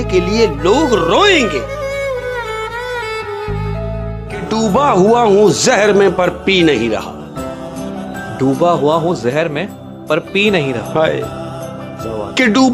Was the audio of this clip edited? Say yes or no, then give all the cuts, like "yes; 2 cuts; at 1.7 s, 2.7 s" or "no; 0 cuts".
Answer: yes; 1 cut; at 4.2 s